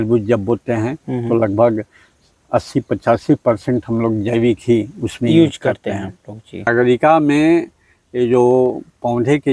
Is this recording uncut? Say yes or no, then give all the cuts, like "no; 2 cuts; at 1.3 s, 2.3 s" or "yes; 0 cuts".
no; 1 cut; at 6.7 s